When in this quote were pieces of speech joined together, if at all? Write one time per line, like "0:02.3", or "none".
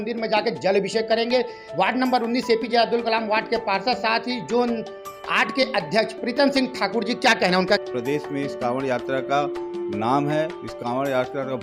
0:01.6
0:07.8

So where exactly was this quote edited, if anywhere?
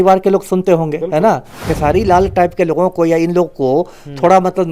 0:01.6

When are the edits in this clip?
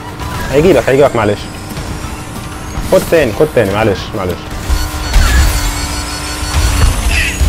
none

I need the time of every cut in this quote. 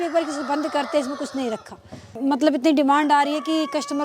0:02.2

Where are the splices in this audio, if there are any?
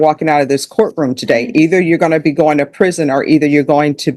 none

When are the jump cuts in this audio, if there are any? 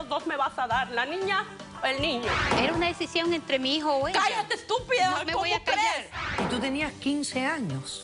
0:02.5
0:06.4

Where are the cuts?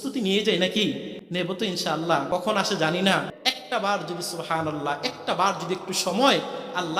0:01.2
0:02.3
0:03.3

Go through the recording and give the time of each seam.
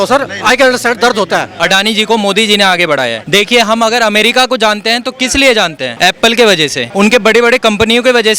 0:01.5
0:03.2
0:05.8
0:06.8

